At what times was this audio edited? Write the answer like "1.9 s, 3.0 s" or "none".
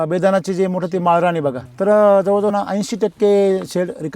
1.6 s, 2.5 s